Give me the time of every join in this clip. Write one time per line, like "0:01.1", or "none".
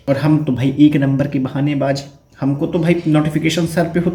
none